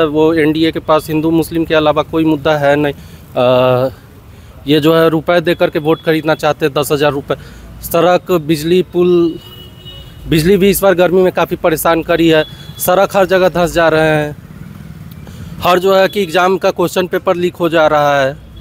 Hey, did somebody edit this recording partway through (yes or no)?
no